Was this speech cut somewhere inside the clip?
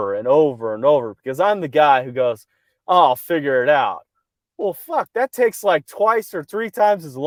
no; 0 cuts

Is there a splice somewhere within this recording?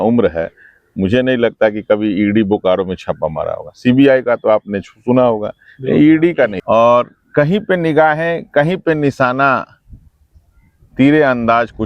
yes; 1 cut; at 6.6 s

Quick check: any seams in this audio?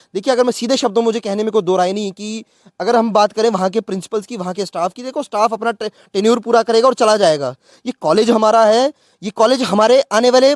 no; 0 cuts

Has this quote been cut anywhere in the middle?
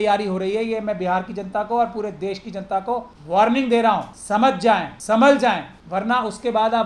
yes; 3 cuts; at 3.1 s, 4.7 s, 5.7 s

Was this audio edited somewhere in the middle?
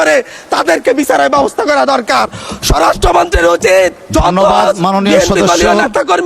no; 0 cuts

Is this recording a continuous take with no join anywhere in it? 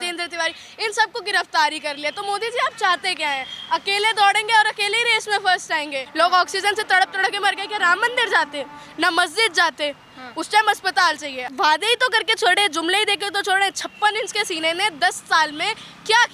no; 2 cuts; at 6.0 s, 11.4 s

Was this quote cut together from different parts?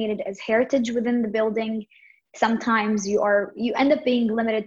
no; 0 cuts

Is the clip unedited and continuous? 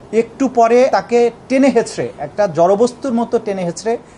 no; 1 cut; at 0.9 s

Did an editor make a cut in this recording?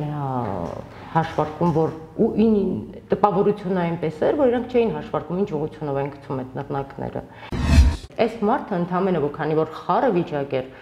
yes; 1 cut; at 7.7 s

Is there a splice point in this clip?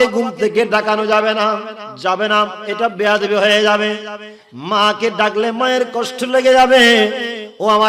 yes; 1 cut; at 1.8 s

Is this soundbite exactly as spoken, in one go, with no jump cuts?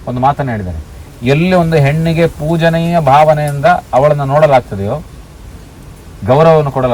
yes; 0 cuts

